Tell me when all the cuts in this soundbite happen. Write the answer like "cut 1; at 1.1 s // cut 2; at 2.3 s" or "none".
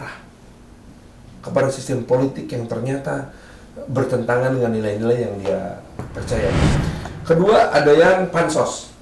cut 1; at 6.8 s